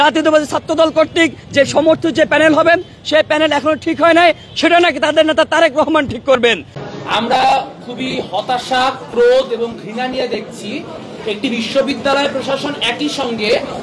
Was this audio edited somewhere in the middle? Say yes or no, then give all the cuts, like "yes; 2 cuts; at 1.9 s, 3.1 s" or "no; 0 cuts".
yes; 1 cut; at 6.7 s